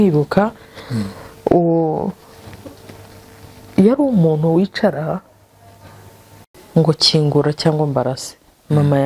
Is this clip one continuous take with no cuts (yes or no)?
no